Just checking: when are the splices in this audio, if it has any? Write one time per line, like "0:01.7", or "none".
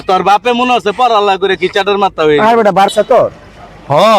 0:02.9